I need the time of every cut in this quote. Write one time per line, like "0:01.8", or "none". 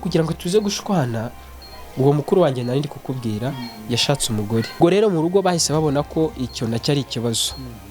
0:04.8